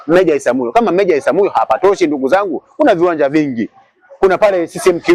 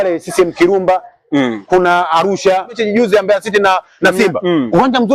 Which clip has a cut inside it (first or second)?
second